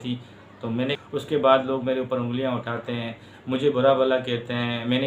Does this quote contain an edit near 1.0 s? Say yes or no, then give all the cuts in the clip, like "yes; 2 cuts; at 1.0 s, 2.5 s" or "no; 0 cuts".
yes; 1 cut; at 1.0 s